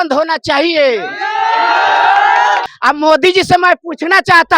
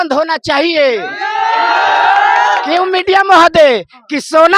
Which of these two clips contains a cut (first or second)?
first